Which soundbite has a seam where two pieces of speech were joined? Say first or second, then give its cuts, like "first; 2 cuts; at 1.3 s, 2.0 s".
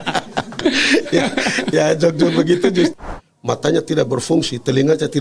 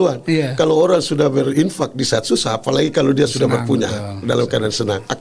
first; 1 cut; at 2.9 s